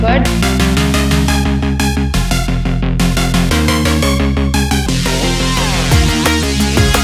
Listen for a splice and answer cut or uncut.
uncut